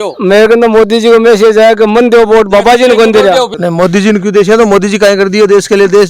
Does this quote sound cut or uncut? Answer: cut